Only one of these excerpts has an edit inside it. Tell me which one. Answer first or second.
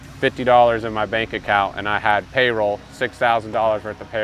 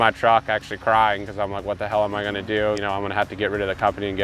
second